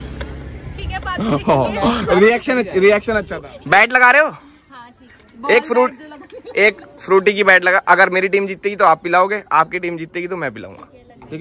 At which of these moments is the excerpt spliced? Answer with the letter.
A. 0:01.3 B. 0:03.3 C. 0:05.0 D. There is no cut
B